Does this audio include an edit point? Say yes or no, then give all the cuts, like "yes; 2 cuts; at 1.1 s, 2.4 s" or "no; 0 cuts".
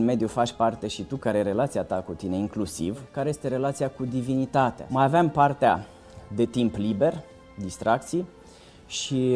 yes; 2 cuts; at 3.1 s, 4.8 s